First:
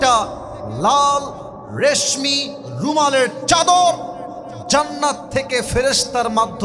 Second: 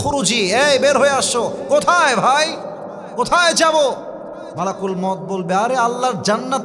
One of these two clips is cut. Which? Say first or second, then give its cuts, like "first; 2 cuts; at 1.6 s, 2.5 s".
second; 1 cut; at 4.5 s